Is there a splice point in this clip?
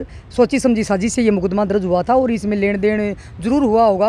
no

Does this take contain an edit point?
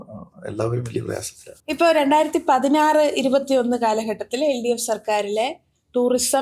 no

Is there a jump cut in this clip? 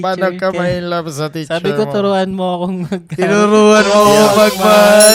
no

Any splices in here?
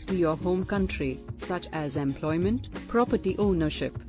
no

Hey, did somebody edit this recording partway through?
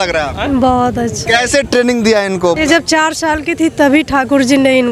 yes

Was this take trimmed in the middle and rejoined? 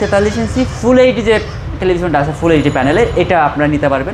no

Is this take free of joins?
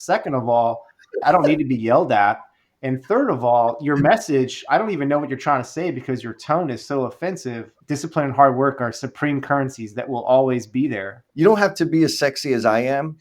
no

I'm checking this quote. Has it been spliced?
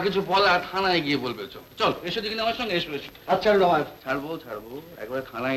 no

